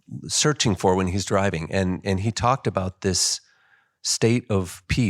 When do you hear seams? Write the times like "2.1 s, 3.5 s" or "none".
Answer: none